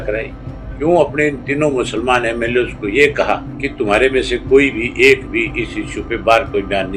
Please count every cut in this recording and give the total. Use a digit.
1